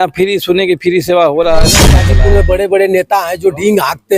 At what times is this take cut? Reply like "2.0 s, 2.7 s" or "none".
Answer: 2.0 s